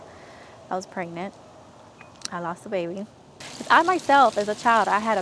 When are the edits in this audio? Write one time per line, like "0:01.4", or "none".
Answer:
0:03.5